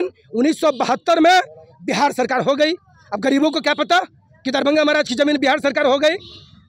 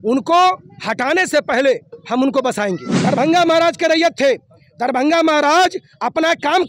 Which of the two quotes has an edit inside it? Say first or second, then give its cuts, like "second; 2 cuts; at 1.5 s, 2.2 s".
second; 1 cut; at 2.9 s